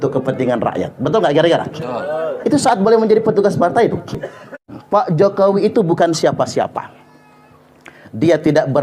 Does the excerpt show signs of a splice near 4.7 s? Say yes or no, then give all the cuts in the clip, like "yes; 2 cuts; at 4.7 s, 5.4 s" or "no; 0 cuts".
yes; 1 cut; at 4.7 s